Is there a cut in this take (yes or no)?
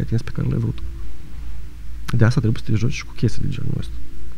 no